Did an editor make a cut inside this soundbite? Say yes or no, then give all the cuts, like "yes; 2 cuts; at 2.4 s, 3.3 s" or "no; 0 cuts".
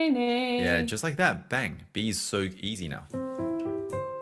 no; 0 cuts